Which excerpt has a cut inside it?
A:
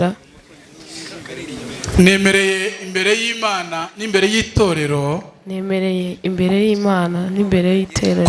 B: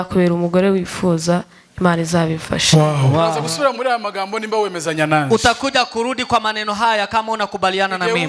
B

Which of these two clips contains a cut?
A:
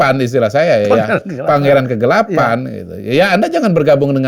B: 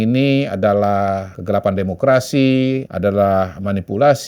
B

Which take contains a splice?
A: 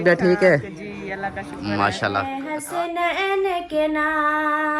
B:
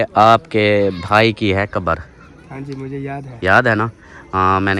A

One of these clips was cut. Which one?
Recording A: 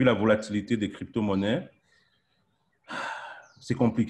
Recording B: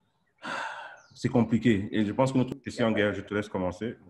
B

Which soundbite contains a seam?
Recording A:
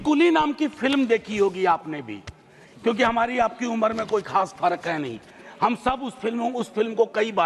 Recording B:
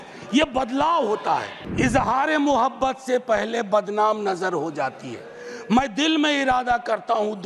B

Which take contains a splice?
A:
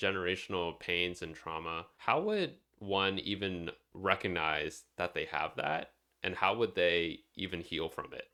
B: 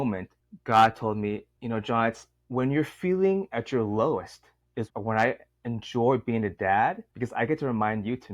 B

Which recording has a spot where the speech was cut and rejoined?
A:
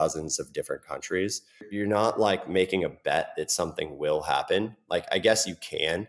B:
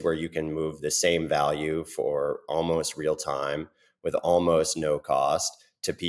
A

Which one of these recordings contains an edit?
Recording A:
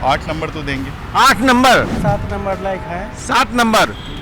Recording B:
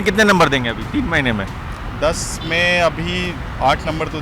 A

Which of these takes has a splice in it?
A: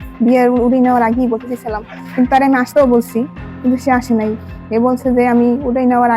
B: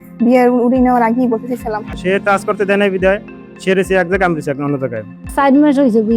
B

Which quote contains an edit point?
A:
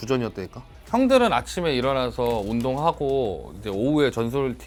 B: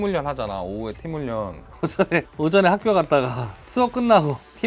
B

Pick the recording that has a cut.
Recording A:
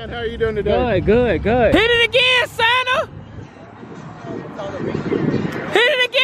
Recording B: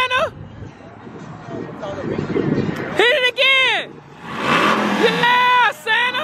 A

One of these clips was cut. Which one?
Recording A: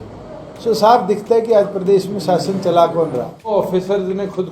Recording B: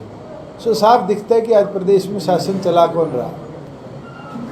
A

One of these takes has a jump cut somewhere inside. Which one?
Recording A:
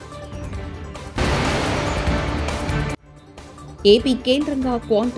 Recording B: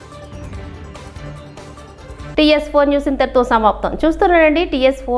A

